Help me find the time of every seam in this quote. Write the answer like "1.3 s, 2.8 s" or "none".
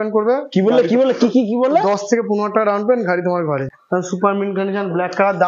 3.6 s